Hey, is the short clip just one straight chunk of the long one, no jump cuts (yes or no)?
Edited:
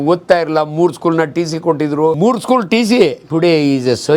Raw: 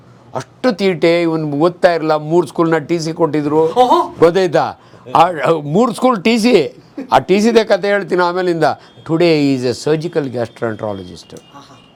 no